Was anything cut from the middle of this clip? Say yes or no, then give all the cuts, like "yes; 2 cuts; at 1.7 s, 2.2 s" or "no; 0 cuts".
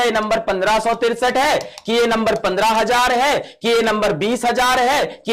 no; 0 cuts